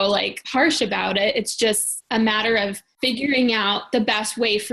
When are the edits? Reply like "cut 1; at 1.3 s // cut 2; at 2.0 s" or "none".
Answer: cut 1; at 2.9 s

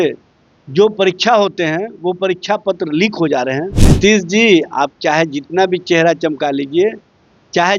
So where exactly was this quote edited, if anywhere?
cut 1; at 3.9 s

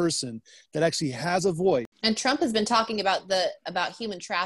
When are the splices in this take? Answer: cut 1; at 1.9 s

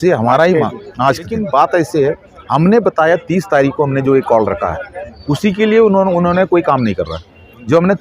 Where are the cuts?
cut 1; at 1.4 s

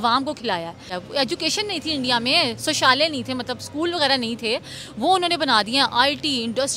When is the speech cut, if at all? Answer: cut 1; at 0.9 s

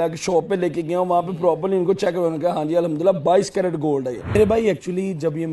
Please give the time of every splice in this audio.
cut 1; at 4.3 s

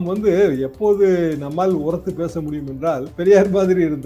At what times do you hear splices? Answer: cut 1; at 3.1 s

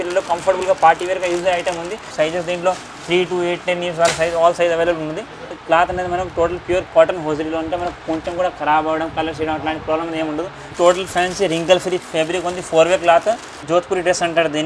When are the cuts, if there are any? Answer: cut 1; at 2.1 s // cut 2; at 5.5 s // cut 3; at 10.6 s // cut 4; at 13.6 s

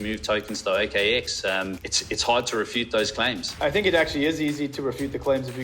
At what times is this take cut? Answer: cut 1; at 1.9 s // cut 2; at 3.5 s

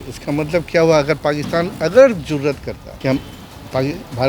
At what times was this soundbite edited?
cut 1; at 2.9 s

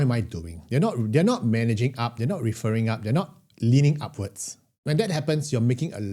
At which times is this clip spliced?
cut 1; at 4.8 s

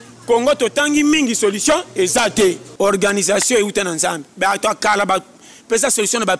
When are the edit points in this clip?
cut 1; at 2.7 s

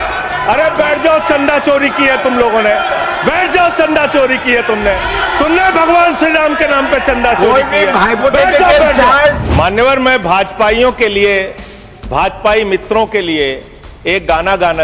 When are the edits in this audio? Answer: cut 1; at 9.4 s

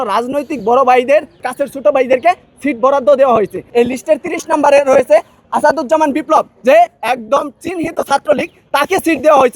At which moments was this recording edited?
cut 1; at 1.5 s // cut 2; at 3.6 s // cut 3; at 5.4 s

